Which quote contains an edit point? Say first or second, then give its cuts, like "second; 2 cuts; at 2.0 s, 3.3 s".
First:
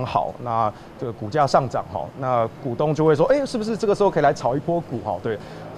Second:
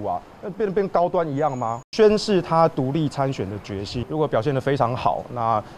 second; 2 cuts; at 1.8 s, 4.0 s